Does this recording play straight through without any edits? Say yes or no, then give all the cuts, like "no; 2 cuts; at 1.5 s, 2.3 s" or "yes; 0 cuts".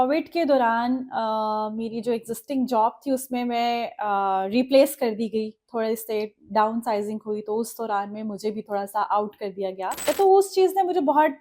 no; 1 cut; at 10.0 s